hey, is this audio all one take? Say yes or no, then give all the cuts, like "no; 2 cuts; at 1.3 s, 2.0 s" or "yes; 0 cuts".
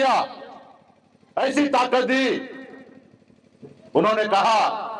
yes; 0 cuts